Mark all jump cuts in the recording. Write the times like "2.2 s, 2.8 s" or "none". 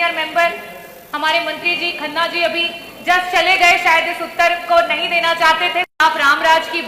5.9 s